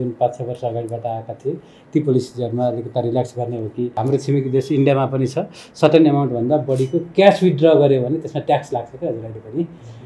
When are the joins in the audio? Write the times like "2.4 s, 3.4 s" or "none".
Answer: 4.0 s

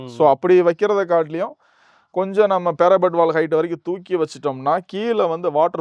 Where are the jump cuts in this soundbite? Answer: none

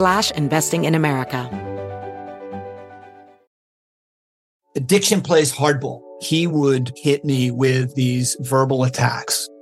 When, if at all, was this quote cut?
1.5 s

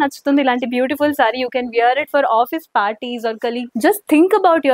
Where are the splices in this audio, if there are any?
3.7 s

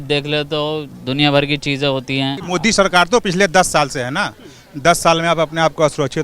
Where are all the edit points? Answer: 2.4 s

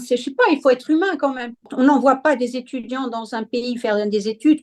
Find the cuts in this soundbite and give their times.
1.6 s

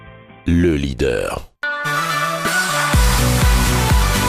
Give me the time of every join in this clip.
1.5 s

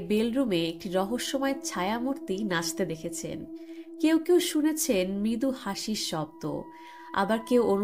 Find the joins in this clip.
none

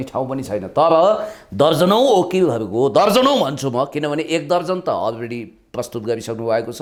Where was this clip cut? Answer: none

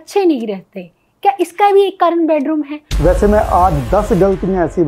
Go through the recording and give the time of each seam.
2.8 s

